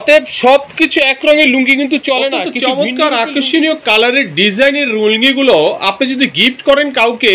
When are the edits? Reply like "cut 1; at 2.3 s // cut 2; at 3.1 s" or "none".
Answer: cut 1; at 2.5 s